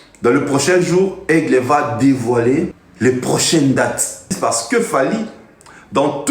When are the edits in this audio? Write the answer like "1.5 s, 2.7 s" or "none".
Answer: 2.8 s, 4.4 s

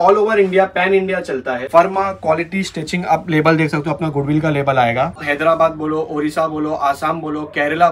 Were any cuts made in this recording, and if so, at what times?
1.7 s, 5.2 s

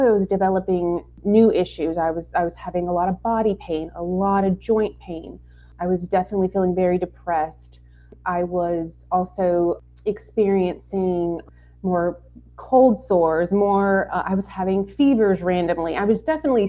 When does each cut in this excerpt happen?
1.1 s, 5.7 s, 8.1 s, 9.9 s, 11.5 s

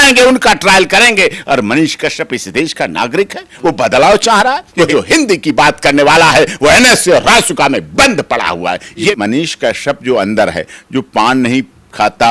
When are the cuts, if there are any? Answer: 4.9 s, 9.1 s

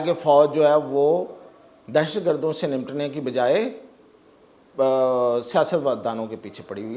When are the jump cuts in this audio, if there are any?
none

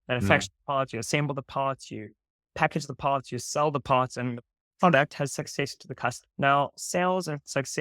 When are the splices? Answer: 6.2 s

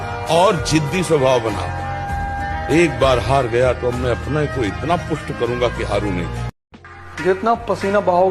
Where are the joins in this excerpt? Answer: 6.7 s

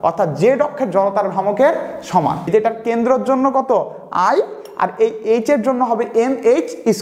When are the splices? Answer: 2.4 s

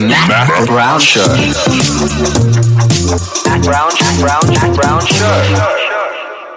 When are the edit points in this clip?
none

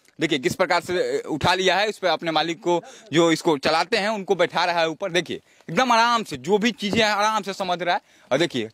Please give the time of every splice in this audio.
none

